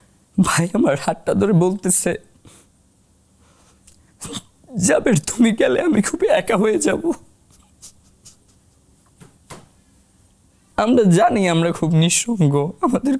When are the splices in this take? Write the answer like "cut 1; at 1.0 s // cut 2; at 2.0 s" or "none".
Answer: cut 1; at 10.7 s